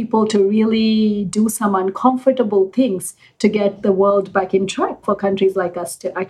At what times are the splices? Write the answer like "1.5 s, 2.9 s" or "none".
5.0 s